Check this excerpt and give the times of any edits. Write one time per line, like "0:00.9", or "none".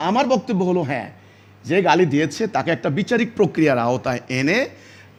none